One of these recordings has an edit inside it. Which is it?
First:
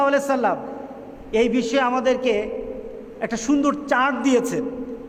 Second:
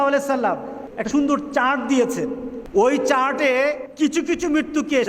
second; 3 cuts; at 0.9 s, 2.5 s, 3.9 s

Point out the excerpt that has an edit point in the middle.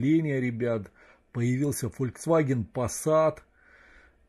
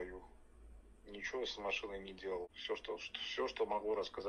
second; 1 cut; at 2.5 s

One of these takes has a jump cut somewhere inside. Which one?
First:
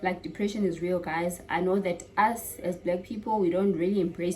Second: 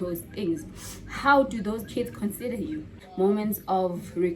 second; 1 cut; at 3.0 s

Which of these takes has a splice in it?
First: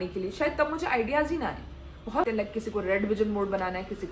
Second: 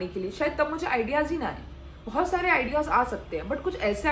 first; 1 cut; at 2.2 s

